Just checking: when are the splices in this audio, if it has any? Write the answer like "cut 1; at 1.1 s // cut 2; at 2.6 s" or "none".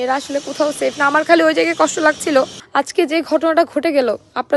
cut 1; at 2.6 s